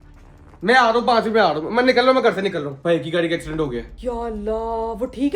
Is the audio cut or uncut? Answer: cut